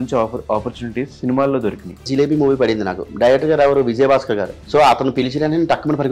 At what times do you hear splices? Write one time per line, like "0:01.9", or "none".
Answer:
0:02.0
0:04.6